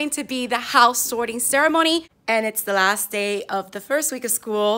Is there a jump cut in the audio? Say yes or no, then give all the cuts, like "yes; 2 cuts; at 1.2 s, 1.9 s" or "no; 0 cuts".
yes; 1 cut; at 2.2 s